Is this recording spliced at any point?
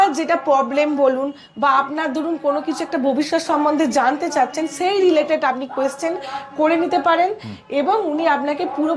no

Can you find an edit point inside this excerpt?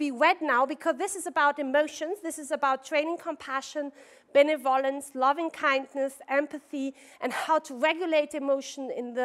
yes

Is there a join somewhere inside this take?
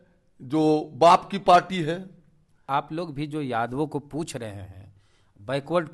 yes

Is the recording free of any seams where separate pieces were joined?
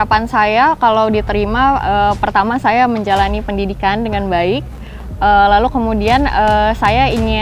yes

